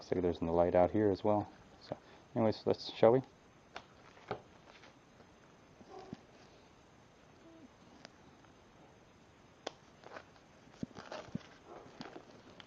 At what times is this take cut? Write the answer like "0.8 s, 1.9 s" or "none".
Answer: none